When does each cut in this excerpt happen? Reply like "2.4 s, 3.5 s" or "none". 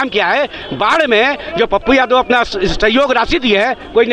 none